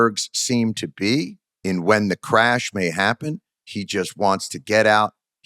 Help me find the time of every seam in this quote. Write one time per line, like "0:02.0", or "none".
0:01.4